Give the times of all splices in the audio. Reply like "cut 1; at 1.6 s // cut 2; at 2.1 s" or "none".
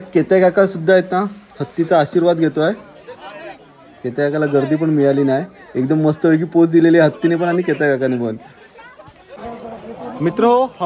none